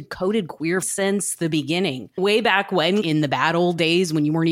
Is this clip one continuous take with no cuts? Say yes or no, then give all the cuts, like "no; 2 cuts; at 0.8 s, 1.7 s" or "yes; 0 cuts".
no; 3 cuts; at 0.9 s, 2.0 s, 3.0 s